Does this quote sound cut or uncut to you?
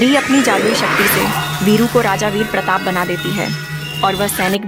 uncut